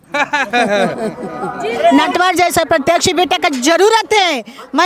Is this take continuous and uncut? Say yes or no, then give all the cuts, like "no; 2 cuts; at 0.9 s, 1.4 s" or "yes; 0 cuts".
no; 1 cut; at 1.9 s